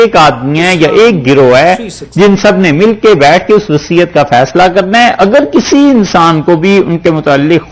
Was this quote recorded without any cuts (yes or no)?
yes